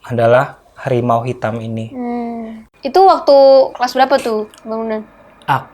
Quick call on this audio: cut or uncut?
cut